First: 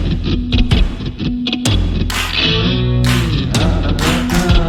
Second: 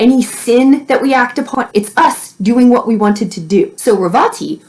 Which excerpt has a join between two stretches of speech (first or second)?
second